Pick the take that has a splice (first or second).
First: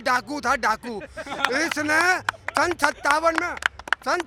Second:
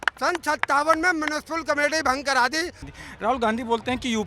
second